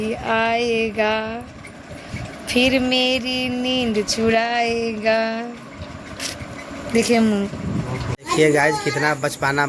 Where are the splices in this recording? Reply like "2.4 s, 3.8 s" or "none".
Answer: 8.3 s